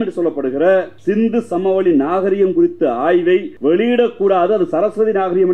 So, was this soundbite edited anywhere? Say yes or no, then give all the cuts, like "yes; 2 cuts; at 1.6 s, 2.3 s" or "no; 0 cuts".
yes; 2 cuts; at 0.9 s, 3.5 s